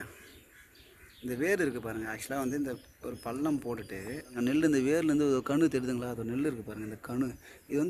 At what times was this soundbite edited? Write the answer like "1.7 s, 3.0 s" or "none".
4.4 s

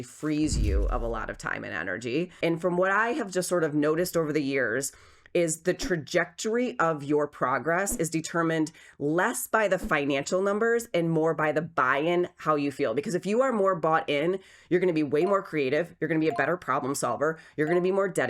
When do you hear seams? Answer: 2.3 s

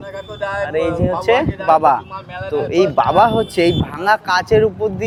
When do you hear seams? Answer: none

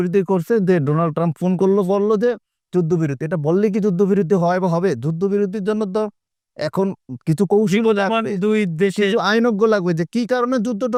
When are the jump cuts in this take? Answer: none

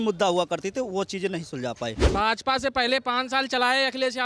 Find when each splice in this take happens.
2.0 s

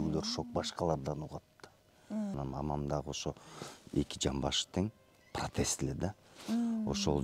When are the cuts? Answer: 2.3 s

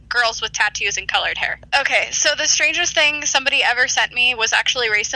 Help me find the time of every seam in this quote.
1.6 s

